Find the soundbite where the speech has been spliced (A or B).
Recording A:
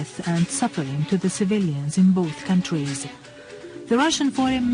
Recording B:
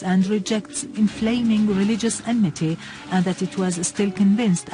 B